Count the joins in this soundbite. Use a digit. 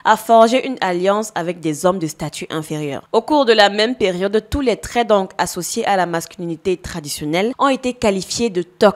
2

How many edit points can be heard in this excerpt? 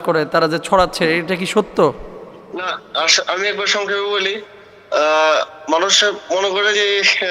0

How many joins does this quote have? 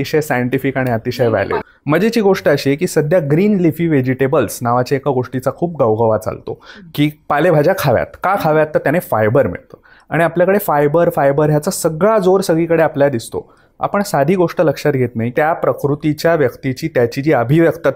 2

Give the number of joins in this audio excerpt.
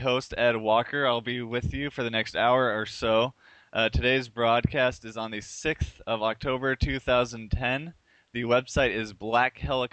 0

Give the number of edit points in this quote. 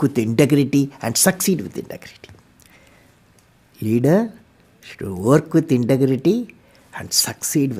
0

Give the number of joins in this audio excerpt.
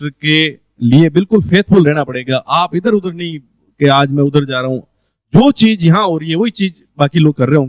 0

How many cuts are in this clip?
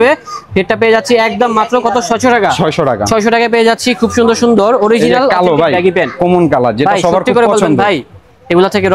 0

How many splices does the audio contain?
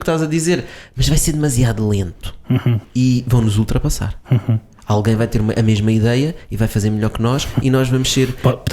1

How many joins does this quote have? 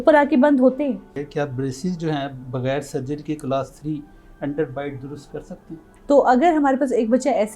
2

